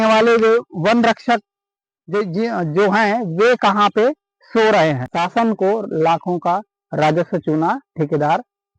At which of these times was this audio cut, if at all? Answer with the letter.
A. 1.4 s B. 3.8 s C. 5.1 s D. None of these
C